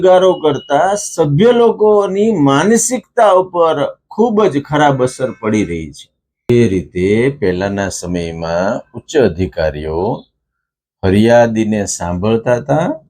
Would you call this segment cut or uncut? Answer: cut